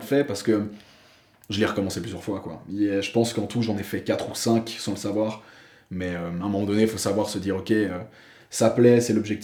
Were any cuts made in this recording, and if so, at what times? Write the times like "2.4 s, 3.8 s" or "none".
none